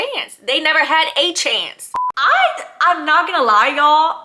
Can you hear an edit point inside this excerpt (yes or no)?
yes